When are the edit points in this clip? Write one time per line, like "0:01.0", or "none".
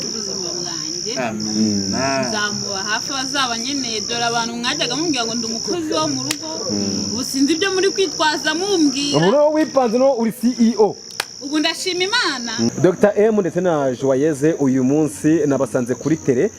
0:12.7